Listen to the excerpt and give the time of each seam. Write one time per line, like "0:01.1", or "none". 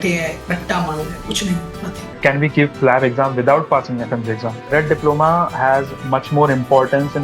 0:02.2
0:04.7